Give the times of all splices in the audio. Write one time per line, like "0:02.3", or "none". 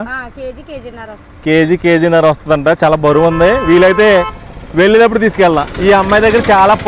none